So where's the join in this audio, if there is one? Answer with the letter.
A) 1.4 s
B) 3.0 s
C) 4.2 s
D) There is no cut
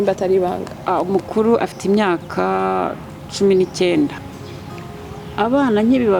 C